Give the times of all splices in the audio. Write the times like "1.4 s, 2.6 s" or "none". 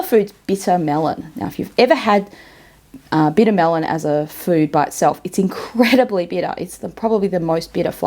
none